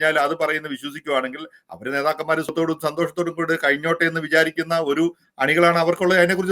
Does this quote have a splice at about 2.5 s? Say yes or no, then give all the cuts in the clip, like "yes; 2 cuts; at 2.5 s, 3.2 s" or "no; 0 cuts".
yes; 1 cut; at 2.5 s